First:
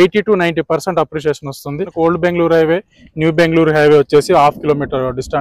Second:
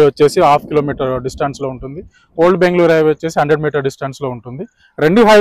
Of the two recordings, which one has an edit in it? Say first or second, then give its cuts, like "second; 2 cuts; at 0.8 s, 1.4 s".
first; 1 cut; at 1.9 s